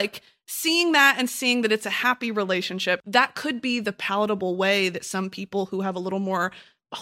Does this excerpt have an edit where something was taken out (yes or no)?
yes